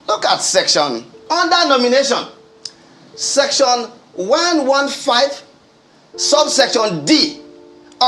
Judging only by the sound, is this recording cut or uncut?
cut